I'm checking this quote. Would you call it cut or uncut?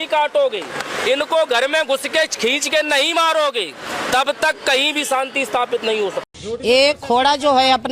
cut